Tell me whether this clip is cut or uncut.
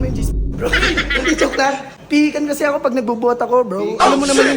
cut